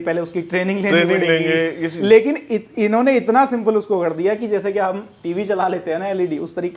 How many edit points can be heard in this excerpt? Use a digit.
0